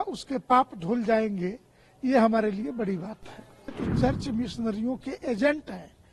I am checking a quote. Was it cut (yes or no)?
yes